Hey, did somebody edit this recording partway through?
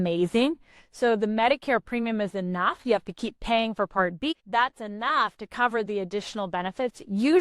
yes; 1 cut; at 4.3 s

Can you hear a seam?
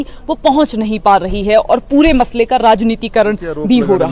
no; 0 cuts

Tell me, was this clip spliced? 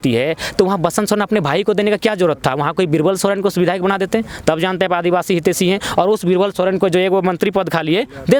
no; 0 cuts

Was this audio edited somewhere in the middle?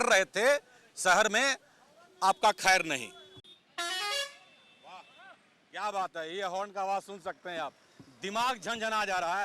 yes; 1 cut; at 3.3 s

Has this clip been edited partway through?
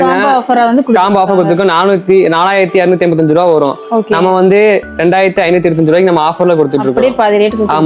no; 0 cuts

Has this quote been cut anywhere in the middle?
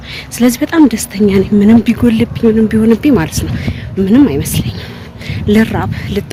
no; 0 cuts

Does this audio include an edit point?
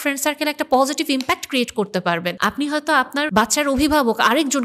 yes; 2 cuts; at 2.3 s, 3.3 s

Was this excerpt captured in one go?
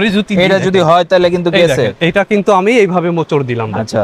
yes; 0 cuts

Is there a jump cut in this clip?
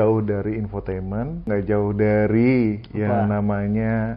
yes; 1 cut; at 1.5 s

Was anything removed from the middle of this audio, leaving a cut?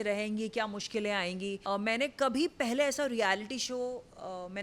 yes; 1 cut; at 1.6 s

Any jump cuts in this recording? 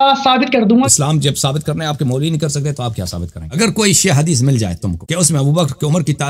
yes; 3 cuts; at 0.9 s, 3.4 s, 4.9 s

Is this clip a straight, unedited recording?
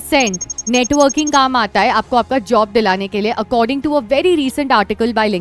yes; 0 cuts

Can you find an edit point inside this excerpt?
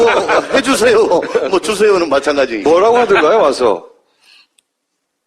yes; 1 cut; at 3.2 s

